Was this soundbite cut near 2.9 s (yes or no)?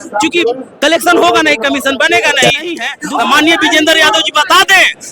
yes